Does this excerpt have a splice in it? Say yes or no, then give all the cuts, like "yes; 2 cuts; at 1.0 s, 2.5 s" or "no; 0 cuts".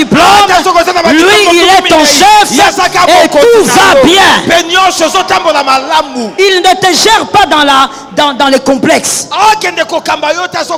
no; 0 cuts